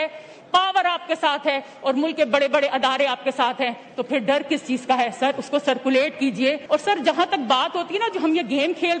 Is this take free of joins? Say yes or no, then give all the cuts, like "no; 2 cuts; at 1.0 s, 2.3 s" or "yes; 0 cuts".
no; 1 cut; at 6.6 s